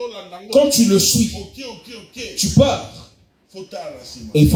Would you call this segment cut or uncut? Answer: uncut